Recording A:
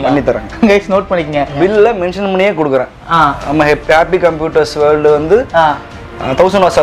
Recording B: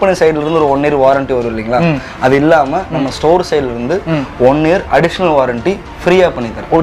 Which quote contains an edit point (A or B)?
A